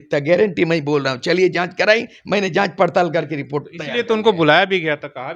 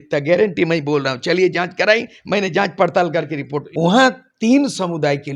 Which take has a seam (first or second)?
second